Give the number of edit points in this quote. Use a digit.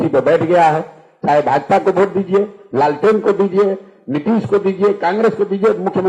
0